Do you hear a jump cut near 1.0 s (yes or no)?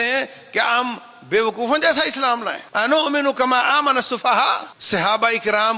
no